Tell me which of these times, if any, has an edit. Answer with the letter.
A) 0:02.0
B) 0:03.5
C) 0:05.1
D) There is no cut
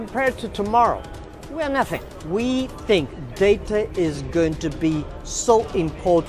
A